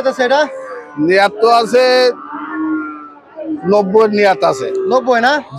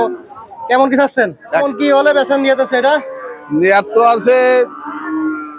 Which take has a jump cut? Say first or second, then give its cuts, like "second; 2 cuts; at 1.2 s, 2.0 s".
second; 1 cut; at 1.6 s